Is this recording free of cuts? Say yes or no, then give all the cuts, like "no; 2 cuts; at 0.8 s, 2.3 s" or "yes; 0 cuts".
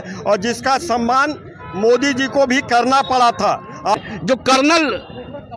no; 1 cut; at 3.9 s